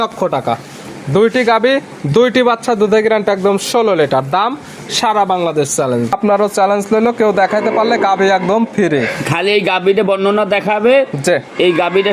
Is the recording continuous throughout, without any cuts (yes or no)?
no